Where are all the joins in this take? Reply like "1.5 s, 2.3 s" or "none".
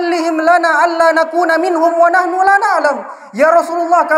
none